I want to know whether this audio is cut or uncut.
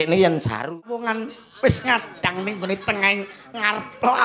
cut